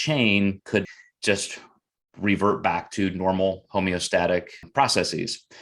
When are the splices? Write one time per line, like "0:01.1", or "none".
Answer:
0:00.8
0:04.7